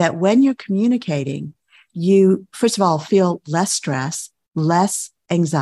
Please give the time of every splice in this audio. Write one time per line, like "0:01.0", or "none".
none